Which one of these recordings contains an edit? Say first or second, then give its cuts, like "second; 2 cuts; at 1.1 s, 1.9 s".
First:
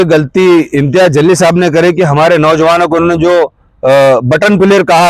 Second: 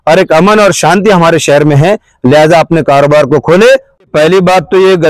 second; 1 cut; at 4.0 s